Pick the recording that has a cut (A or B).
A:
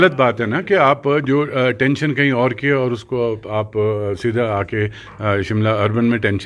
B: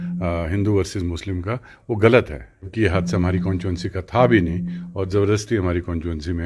B